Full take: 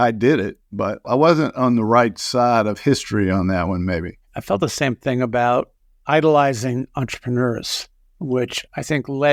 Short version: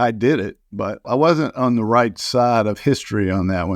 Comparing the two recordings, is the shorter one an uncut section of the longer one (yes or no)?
yes